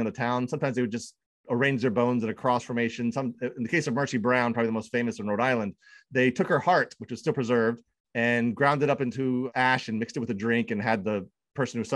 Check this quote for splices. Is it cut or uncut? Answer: uncut